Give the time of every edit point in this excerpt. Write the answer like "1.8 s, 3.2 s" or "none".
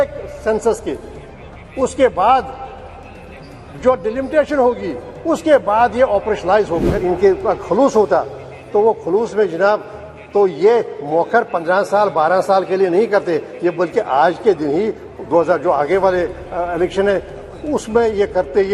6.9 s